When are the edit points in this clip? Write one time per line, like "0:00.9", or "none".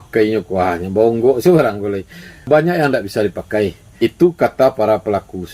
0:02.5
0:03.9